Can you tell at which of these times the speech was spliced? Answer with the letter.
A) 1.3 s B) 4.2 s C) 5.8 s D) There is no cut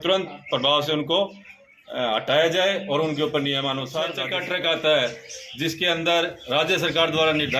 B